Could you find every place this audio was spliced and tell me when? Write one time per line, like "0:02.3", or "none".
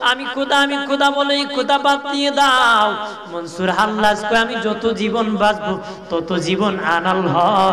none

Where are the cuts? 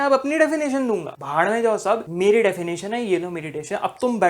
0:01.2
0:02.1

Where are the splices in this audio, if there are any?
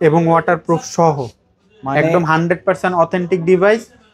none

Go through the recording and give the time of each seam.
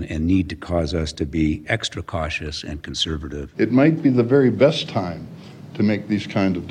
0:03.4

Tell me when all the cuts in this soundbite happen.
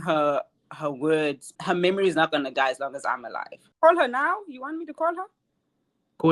0:01.6
0:03.6

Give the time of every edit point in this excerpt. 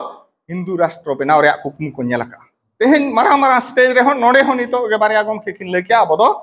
0:02.6

